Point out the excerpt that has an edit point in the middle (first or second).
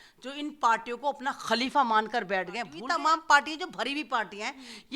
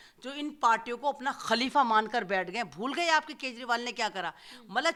first